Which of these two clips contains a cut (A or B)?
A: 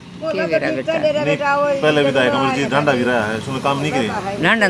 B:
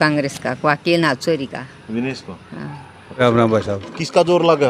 B